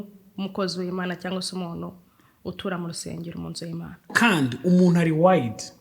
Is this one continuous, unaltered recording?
no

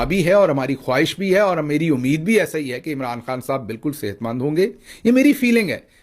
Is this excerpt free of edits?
no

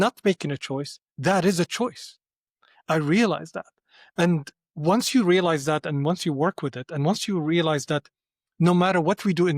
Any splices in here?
no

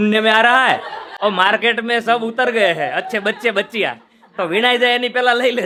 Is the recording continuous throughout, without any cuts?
yes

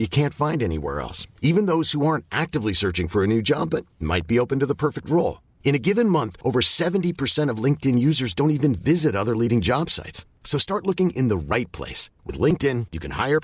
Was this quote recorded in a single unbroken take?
yes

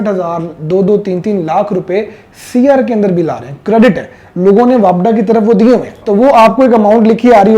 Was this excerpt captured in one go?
no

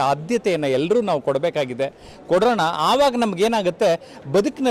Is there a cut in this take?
no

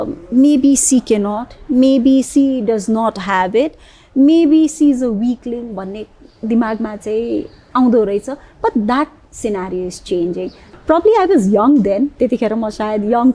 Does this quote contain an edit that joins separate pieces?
yes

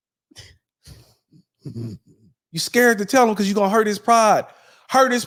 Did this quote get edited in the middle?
no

